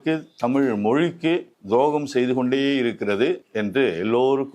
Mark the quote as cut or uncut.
cut